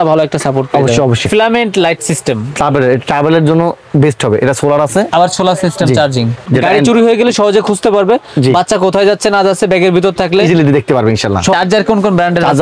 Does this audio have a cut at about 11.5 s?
yes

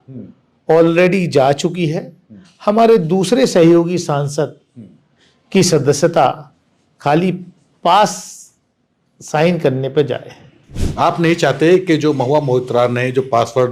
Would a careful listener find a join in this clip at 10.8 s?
yes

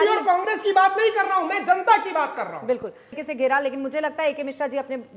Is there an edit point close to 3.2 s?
yes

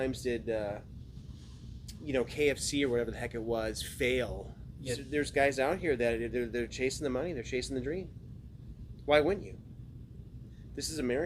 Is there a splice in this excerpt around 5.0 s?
yes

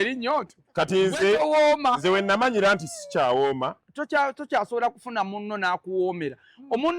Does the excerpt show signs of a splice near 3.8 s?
yes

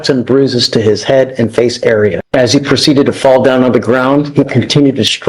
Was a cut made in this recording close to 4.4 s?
no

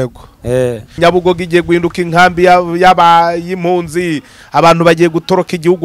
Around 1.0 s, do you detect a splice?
yes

